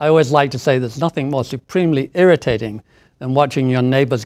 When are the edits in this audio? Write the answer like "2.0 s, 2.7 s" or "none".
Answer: none